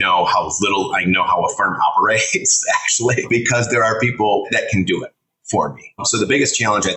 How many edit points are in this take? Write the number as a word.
three